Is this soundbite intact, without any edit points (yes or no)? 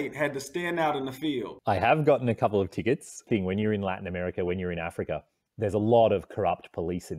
no